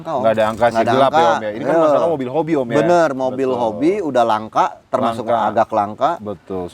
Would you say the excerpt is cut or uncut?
uncut